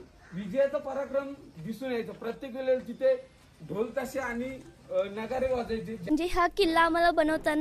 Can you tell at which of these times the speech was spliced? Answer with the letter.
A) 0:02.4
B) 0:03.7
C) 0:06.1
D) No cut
C